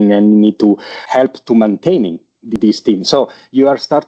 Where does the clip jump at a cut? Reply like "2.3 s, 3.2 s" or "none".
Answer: 0.9 s, 2.5 s